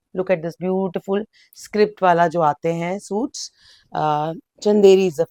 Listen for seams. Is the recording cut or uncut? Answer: uncut